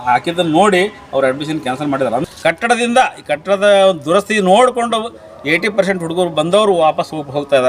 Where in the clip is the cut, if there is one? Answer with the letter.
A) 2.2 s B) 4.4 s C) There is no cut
A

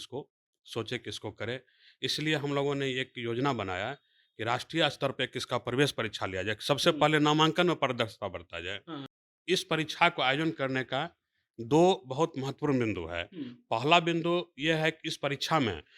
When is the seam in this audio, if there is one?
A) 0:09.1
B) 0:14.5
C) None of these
A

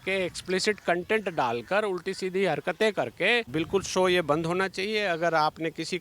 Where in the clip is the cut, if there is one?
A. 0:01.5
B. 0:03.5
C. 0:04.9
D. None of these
B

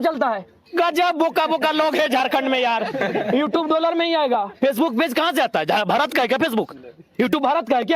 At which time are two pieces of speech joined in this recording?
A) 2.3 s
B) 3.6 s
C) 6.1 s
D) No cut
D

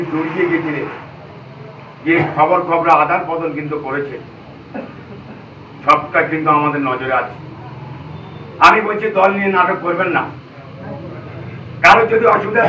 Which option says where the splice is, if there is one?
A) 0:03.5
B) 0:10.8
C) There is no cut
C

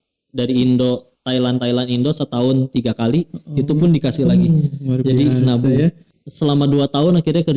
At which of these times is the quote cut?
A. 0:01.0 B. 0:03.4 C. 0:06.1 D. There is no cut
C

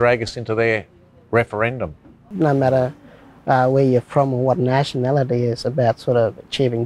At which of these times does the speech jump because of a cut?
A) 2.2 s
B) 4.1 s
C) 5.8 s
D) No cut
A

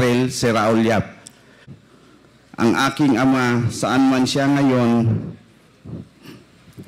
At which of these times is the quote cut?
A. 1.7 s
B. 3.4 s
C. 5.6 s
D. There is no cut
A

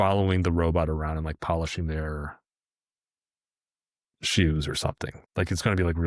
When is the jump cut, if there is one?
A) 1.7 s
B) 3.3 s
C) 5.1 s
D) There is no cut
C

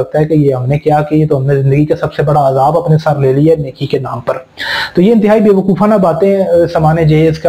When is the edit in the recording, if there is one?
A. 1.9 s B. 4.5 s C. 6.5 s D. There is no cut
D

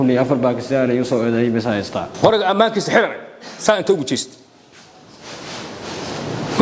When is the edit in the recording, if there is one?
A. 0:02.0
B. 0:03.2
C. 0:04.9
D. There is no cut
A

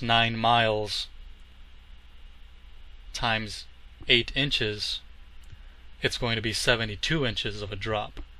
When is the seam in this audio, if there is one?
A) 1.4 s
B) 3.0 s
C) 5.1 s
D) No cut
C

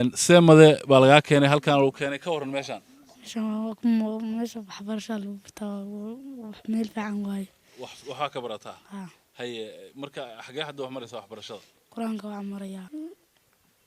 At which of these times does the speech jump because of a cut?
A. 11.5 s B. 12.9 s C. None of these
B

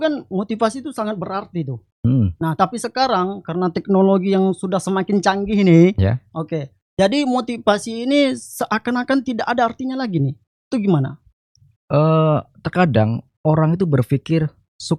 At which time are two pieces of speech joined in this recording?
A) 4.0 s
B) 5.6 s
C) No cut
C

